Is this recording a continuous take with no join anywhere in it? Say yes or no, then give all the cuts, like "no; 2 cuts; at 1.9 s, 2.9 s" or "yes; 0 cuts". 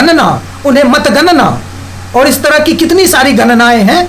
yes; 0 cuts